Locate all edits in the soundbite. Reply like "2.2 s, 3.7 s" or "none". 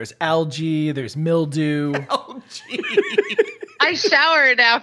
none